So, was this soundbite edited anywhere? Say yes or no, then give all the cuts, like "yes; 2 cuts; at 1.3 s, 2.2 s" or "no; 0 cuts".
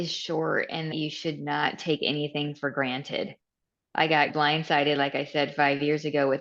yes; 1 cut; at 0.9 s